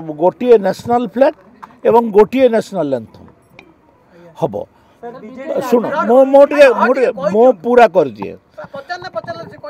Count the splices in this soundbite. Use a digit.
0